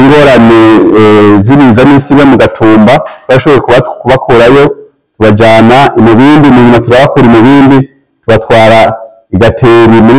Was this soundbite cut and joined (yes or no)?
no